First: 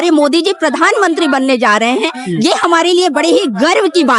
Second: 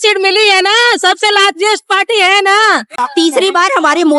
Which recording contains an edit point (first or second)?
second